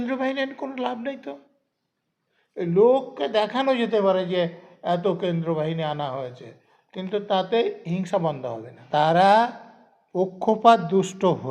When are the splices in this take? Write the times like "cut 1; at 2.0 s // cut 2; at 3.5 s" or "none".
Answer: cut 1; at 8.7 s

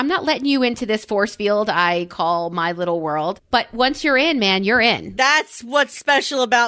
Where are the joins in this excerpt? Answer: cut 1; at 3.4 s // cut 2; at 5.1 s

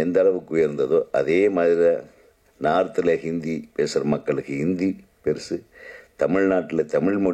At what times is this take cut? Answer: none

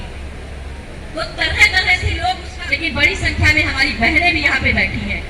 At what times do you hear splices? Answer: cut 1; at 2.5 s

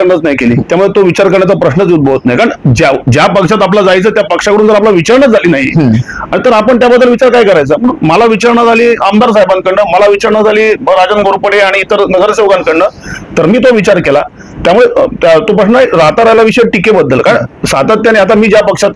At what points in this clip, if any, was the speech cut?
none

